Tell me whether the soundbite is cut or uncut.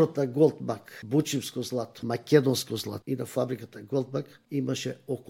cut